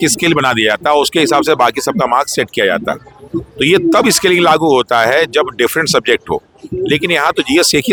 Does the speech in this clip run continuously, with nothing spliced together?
yes; 0 cuts

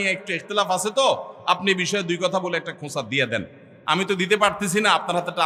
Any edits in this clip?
no; 0 cuts

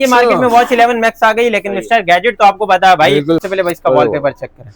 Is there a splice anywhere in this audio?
yes; 1 cut; at 3.4 s

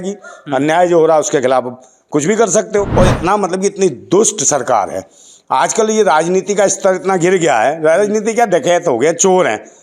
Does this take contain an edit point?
yes; 1 cut; at 2.9 s

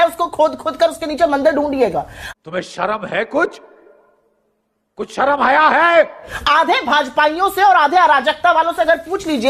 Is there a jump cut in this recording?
no; 0 cuts

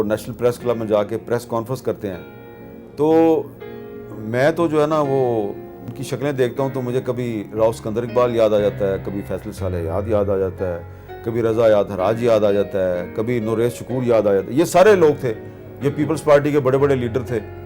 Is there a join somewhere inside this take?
no; 0 cuts

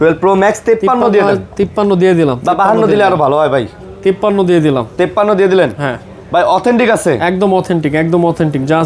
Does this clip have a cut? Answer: no; 0 cuts

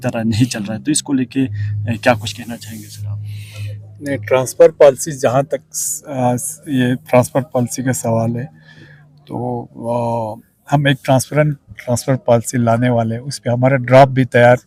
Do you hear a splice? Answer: no; 0 cuts

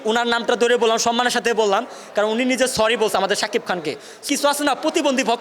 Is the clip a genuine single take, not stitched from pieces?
no; 1 cut; at 4.2 s

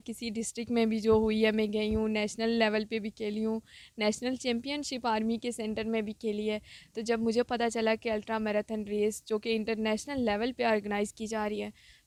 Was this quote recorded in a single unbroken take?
yes; 0 cuts

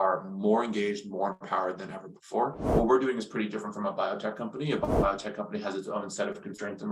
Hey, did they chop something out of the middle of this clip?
yes; 1 cut; at 2.6 s

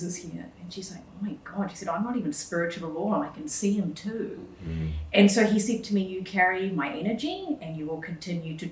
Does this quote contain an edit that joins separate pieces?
no; 0 cuts

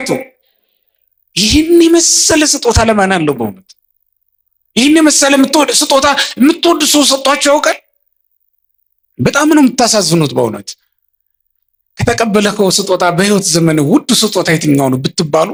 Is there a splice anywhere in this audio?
no; 0 cuts

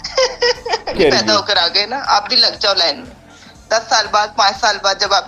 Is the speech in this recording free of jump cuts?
no; 1 cut; at 1.0 s

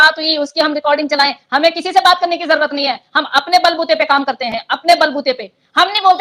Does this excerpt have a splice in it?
no; 0 cuts

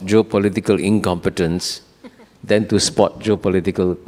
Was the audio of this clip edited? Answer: no; 0 cuts

